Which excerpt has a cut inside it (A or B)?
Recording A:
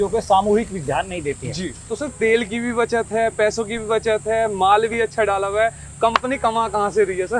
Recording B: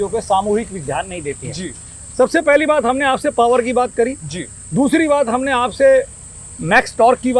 A